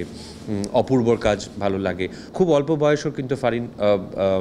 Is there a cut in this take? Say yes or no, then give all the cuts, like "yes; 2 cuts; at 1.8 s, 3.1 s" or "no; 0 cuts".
yes; 1 cut; at 2.2 s